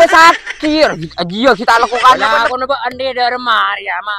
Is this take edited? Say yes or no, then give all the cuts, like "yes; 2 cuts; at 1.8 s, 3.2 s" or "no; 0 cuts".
yes; 1 cut; at 2.4 s